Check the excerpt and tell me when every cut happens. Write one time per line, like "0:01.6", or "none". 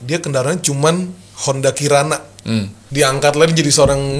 0:02.8

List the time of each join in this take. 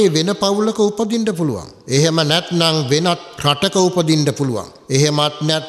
0:01.7
0:03.3
0:04.7

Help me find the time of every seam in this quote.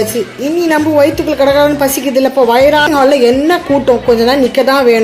0:02.9

